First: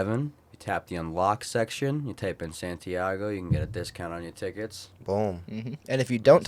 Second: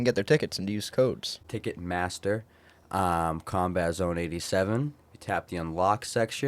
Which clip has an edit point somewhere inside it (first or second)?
second